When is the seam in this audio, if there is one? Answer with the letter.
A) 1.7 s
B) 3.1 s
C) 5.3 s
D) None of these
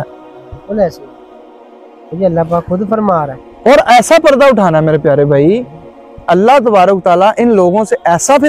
D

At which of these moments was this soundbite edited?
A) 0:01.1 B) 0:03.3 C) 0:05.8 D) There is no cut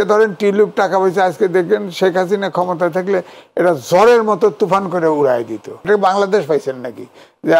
C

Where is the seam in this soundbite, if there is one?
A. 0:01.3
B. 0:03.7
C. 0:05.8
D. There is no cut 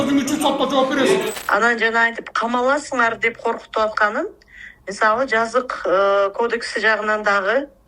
A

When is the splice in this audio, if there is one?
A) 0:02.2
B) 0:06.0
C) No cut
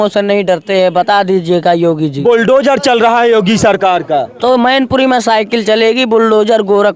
C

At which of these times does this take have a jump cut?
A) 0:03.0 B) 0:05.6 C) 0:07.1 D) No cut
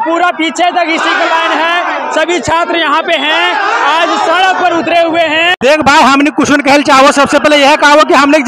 B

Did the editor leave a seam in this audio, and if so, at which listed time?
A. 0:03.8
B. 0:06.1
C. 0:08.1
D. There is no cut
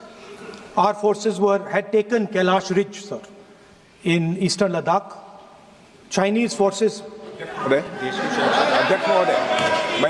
D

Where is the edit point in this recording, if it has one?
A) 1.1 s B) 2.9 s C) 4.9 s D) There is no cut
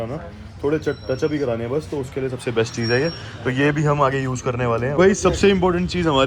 C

